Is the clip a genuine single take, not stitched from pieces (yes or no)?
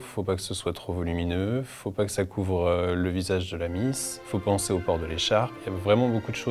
no